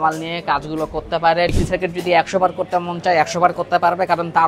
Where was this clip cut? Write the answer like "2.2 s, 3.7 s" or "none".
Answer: 1.6 s